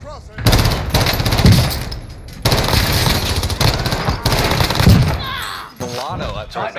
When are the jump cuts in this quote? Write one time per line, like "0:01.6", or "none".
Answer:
0:05.8

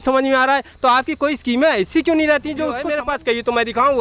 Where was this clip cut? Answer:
0:02.8

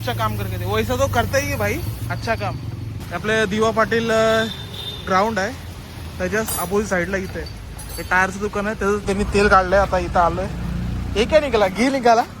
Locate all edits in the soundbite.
0:03.0
0:09.0

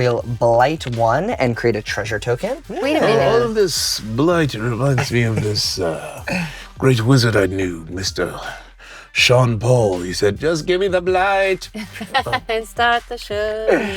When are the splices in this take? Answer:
0:02.7

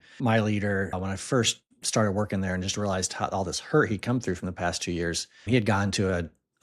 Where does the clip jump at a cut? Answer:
0:01.0

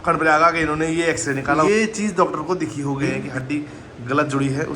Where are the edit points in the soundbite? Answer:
0:01.7
0:03.3

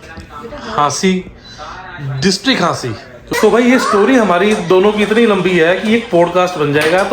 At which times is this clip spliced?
0:03.2

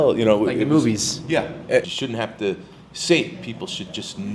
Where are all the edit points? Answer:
0:01.8

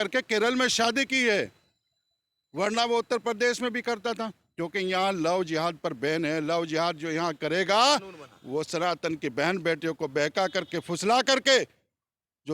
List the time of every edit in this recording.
none

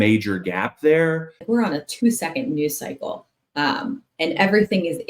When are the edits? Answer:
0:01.4

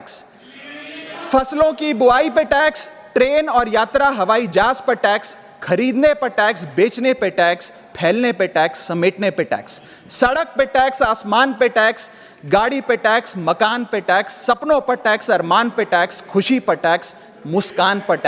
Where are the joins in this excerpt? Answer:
none

